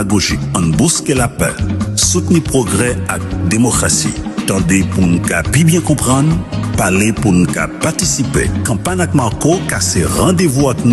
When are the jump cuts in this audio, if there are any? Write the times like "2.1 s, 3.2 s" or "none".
none